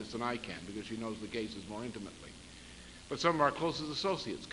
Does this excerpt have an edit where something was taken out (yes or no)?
yes